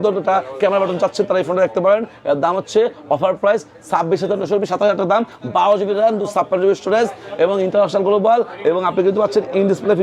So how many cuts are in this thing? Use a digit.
0